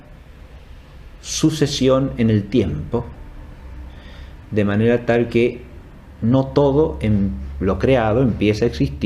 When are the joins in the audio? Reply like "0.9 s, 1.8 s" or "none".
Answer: 1.3 s